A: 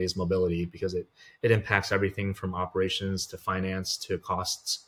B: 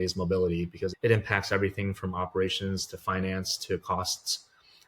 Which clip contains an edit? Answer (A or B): B